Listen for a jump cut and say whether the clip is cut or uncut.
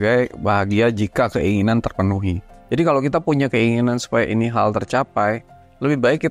cut